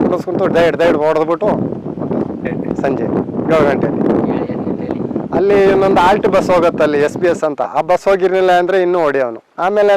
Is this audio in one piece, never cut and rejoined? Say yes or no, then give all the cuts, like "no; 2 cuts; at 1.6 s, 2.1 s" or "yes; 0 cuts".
yes; 0 cuts